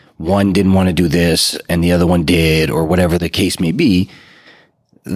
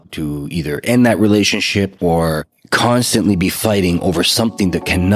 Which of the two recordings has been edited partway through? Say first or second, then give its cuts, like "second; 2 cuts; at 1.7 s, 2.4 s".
first; 1 cut; at 3.2 s